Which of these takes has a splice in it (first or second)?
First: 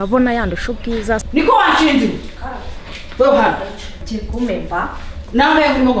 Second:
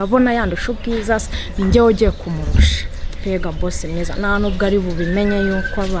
first